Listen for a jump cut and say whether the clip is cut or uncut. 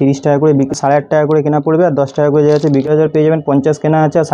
cut